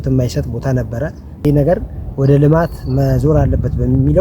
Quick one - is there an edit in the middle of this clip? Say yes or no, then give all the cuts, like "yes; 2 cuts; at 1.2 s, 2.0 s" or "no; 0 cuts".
yes; 1 cut; at 1.3 s